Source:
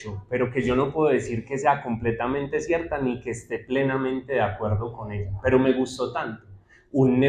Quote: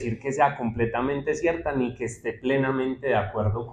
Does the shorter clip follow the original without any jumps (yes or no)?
yes